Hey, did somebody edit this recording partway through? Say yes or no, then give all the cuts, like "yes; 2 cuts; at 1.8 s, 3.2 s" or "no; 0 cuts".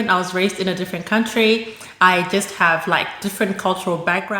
no; 0 cuts